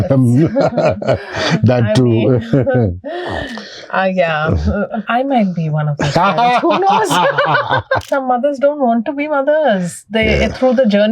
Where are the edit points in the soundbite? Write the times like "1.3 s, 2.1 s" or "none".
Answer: 8.1 s